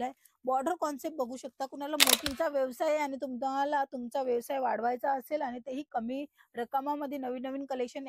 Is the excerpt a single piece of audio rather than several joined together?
no; 1 cut; at 2.3 s

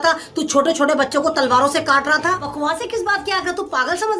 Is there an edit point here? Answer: yes; 1 cut; at 2.5 s

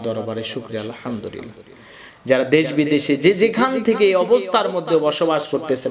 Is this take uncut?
no; 1 cut; at 2.0 s

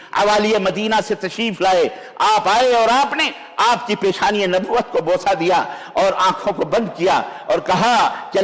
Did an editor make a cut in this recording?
no; 0 cuts

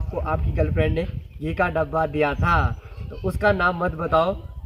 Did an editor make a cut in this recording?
no; 0 cuts

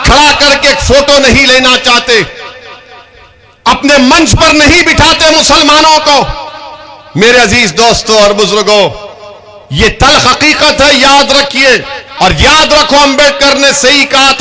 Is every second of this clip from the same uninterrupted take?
no; 1 cut; at 12.0 s

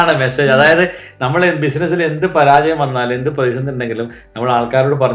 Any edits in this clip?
no; 0 cuts

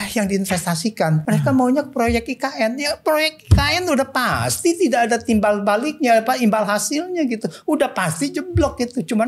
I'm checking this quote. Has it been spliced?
yes; 1 cut; at 1.2 s

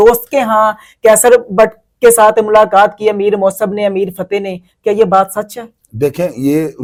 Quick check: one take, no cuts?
yes; 0 cuts

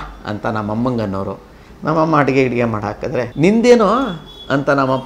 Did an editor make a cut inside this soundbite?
yes; 1 cut; at 3.3 s

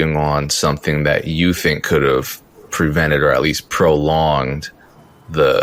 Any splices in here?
no; 0 cuts

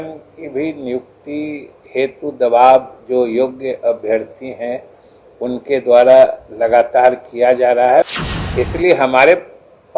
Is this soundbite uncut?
no; 1 cut; at 8.0 s

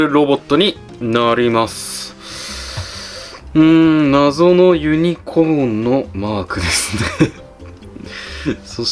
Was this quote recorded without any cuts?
yes; 0 cuts

